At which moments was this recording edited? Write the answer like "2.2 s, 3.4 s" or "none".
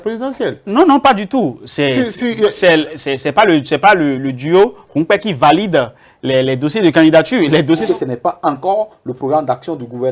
7.8 s